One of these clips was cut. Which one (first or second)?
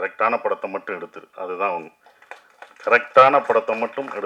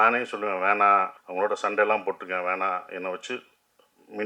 second